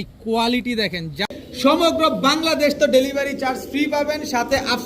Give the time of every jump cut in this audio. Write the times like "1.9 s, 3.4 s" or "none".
1.4 s